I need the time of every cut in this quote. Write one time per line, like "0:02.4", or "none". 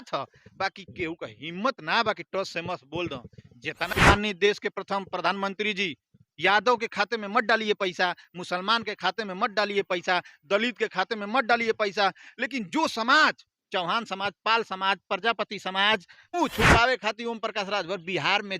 0:03.8
0:16.3